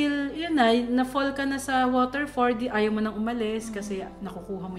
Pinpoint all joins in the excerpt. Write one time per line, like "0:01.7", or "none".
none